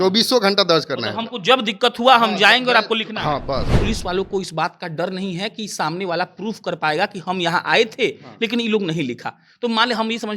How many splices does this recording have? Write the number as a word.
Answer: one